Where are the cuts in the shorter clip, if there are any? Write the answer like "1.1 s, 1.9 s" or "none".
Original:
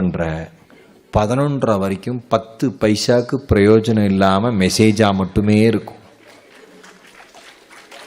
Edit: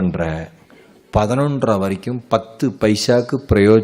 none